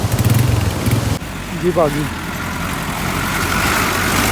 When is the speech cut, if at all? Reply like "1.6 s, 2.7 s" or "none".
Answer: 1.2 s